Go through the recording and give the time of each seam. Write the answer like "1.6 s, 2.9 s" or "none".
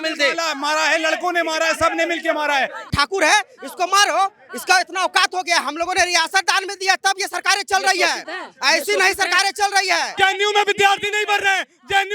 2.9 s, 10.1 s